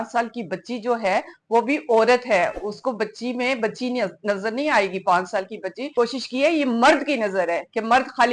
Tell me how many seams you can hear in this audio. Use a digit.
1